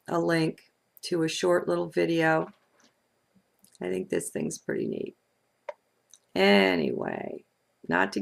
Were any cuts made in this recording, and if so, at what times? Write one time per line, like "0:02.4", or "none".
none